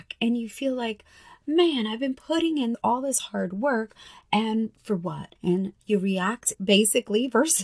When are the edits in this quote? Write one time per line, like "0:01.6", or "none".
0:05.7